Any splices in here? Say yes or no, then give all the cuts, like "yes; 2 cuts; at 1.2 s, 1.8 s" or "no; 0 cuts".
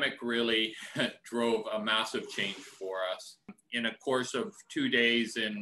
yes; 1 cut; at 3.6 s